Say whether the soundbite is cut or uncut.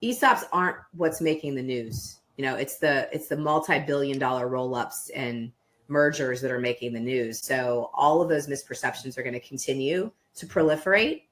cut